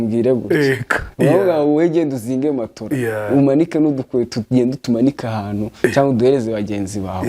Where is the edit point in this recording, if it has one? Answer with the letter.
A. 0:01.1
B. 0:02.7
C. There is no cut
A